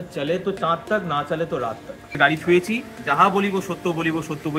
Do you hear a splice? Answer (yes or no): yes